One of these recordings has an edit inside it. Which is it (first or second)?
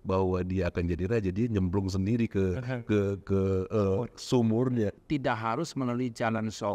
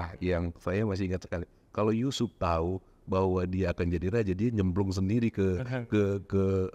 first